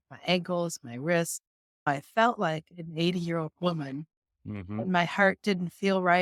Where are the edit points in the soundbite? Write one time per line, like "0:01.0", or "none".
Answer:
0:01.9